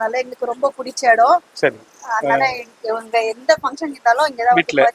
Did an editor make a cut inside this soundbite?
no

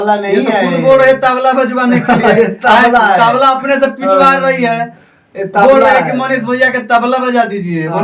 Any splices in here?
no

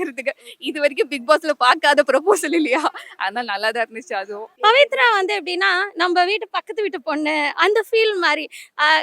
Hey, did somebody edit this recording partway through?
yes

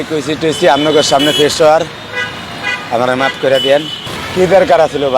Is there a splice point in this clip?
yes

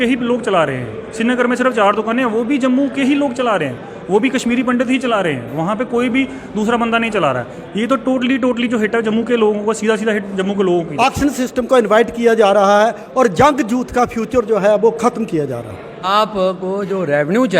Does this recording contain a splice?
yes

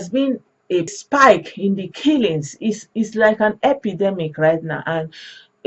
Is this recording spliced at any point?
yes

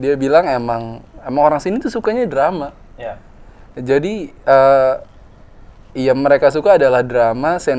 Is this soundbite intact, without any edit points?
yes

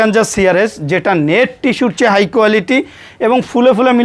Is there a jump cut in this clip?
no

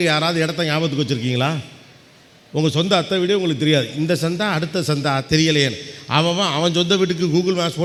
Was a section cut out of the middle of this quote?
no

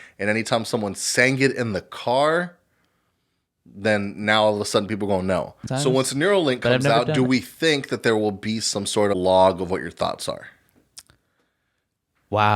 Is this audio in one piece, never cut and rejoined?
no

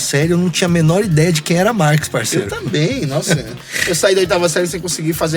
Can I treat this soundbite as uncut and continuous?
yes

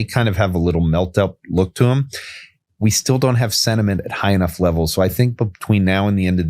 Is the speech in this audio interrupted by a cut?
no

